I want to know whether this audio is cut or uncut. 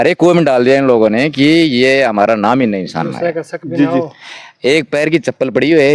uncut